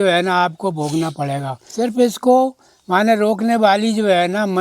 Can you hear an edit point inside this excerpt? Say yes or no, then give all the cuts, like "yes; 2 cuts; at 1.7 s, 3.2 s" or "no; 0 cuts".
yes; 1 cut; at 1.6 s